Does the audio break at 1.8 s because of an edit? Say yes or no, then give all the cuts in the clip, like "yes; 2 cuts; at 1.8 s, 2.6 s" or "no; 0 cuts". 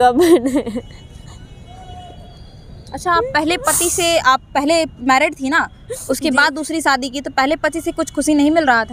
no; 0 cuts